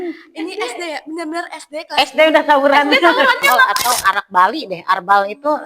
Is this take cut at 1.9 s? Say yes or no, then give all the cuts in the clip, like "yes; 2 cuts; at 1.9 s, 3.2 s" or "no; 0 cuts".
no; 1 cut; at 3.5 s